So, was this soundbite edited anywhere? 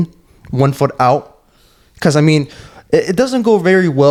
no; 0 cuts

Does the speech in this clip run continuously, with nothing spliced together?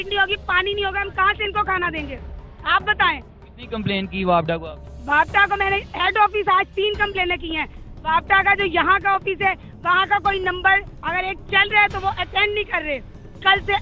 yes; 0 cuts

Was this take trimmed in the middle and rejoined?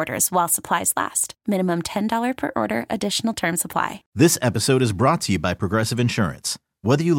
yes; 1 cut; at 4.0 s

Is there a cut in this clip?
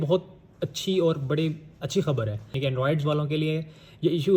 yes; 1 cut; at 2.5 s

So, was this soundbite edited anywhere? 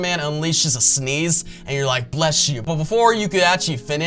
yes; 1 cut; at 2.6 s

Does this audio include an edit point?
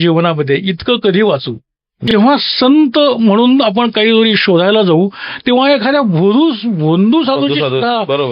yes; 1 cut; at 2.1 s

